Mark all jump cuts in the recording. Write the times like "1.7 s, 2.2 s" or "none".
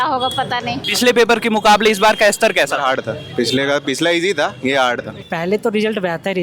0.9 s, 5.2 s